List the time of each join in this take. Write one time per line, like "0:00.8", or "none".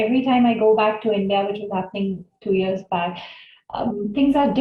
none